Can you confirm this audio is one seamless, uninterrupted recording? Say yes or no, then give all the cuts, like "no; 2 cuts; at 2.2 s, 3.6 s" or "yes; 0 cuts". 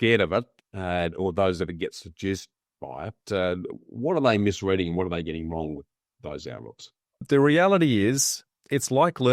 no; 1 cut; at 7.2 s